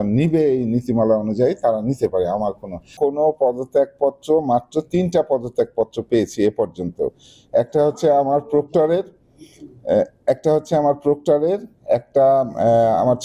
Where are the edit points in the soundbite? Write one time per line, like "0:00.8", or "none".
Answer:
0:02.9